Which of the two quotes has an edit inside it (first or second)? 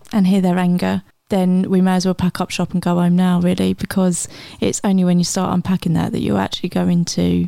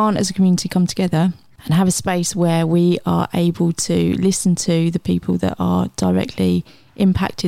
second